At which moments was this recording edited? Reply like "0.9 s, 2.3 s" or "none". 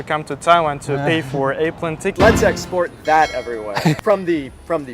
2.1 s, 4.0 s